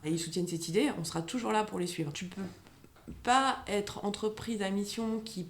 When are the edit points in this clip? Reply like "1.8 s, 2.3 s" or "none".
2.3 s